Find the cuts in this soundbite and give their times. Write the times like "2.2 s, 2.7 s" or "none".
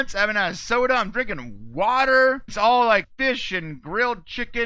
2.5 s, 3.1 s